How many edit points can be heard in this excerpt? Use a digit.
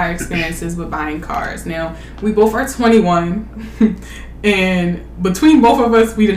0